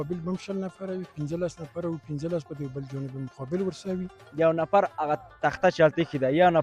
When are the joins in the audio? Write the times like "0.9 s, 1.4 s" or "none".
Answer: 1.1 s, 4.2 s